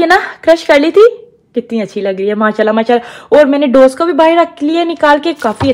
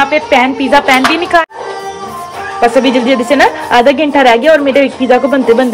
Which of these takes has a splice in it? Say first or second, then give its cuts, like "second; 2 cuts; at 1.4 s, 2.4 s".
second; 1 cut; at 1.4 s